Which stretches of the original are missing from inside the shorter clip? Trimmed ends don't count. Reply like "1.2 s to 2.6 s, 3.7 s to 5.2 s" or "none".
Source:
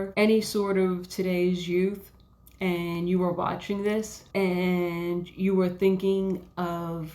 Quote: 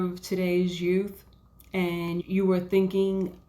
3.1 s to 5.3 s